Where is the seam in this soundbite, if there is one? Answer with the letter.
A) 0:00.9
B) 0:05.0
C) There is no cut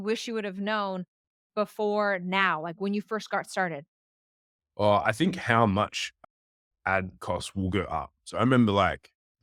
C